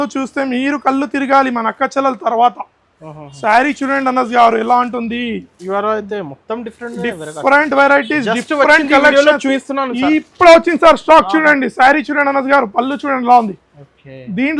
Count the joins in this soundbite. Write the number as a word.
zero